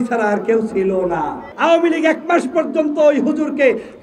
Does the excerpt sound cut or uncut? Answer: cut